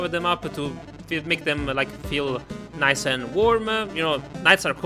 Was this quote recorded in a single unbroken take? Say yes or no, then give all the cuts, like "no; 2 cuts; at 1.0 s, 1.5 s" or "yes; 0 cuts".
yes; 0 cuts